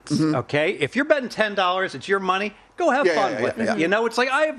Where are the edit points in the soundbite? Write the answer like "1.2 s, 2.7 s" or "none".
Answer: none